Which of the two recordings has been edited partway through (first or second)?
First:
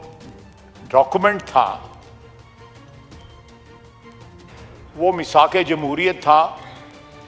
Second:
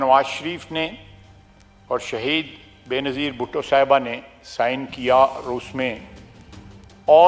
first